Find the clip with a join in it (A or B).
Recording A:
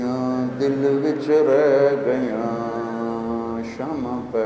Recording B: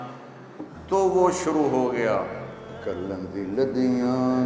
B